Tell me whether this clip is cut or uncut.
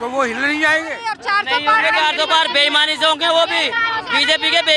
cut